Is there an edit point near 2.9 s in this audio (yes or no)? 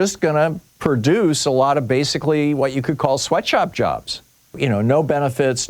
no